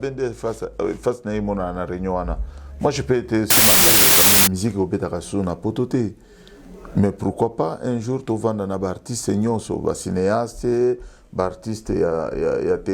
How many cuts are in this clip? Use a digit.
1